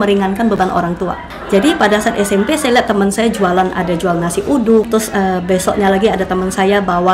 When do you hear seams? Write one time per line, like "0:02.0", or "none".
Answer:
0:01.3
0:04.9